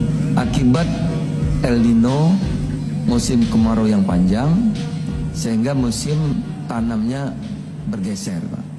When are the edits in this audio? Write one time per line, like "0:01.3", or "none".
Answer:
none